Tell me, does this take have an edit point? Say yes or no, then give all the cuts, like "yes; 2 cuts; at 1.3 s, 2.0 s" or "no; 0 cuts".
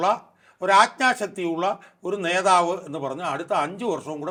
no; 0 cuts